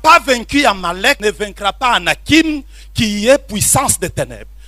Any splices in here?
yes; 1 cut; at 1.2 s

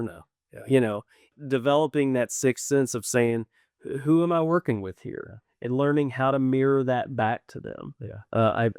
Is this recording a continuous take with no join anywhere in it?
no; 1 cut; at 1.3 s

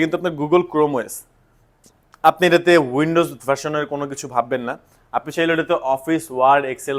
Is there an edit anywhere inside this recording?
no; 0 cuts

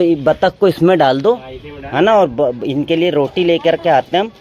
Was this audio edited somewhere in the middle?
no; 0 cuts

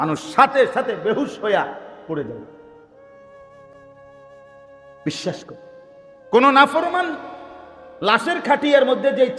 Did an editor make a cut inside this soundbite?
no; 0 cuts

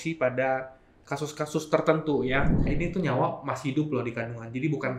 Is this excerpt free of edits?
no; 1 cut; at 2.7 s

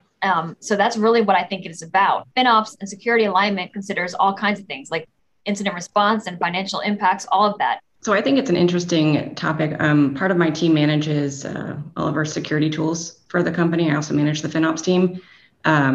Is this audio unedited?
no; 2 cuts; at 2.3 s, 7.9 s

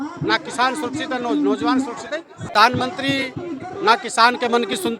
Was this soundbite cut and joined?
yes; 1 cut; at 2.3 s

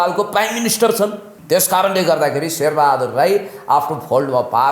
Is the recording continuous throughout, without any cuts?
no; 1 cut; at 1.3 s

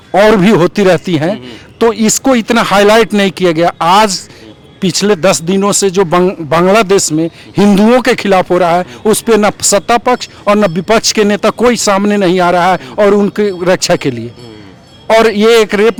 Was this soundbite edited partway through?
no; 0 cuts

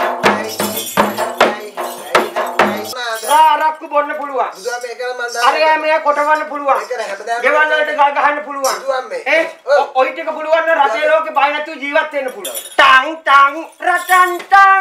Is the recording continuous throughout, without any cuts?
no; 2 cuts; at 2.9 s, 12.5 s

